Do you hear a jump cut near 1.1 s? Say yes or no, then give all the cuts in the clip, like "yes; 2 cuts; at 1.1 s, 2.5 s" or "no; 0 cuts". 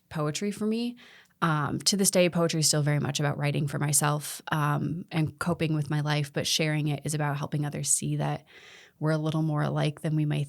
no; 0 cuts